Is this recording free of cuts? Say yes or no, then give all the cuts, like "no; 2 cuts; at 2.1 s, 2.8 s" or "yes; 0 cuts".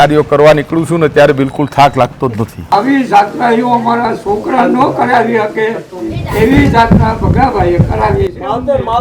no; 1 cut; at 2.7 s